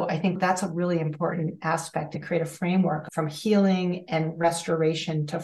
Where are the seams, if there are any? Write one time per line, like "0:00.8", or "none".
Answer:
0:02.1
0:03.0